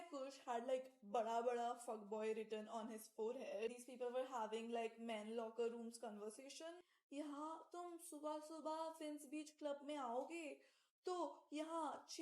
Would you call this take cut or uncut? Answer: cut